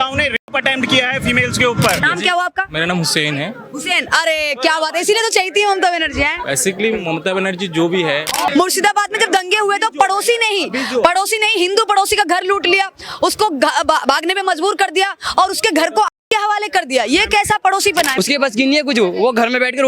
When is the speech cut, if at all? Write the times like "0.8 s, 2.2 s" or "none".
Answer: 2.0 s, 8.5 s, 18.1 s